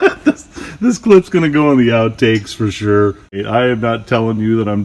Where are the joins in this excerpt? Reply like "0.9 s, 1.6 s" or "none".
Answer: 3.4 s